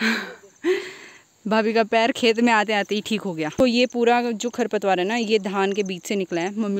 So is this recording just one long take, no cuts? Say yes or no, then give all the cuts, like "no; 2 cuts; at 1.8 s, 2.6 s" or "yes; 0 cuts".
yes; 0 cuts